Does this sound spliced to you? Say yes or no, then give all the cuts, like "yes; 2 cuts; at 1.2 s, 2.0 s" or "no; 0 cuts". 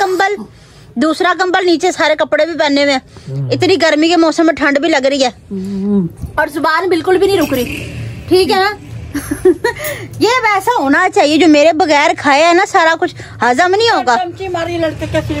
no; 0 cuts